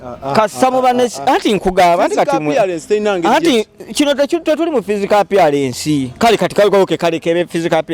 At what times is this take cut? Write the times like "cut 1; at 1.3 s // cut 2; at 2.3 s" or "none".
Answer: none